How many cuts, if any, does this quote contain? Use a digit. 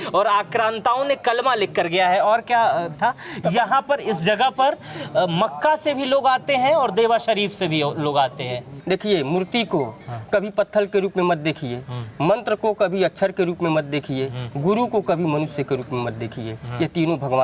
1